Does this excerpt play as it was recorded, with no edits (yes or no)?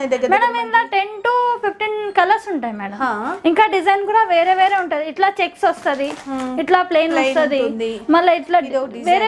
yes